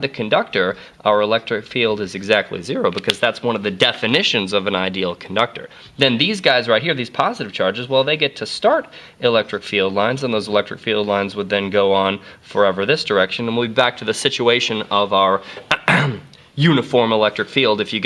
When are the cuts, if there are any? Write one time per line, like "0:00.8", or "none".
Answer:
0:04.9